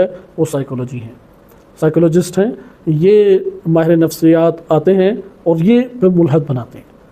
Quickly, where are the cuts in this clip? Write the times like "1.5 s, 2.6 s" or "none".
none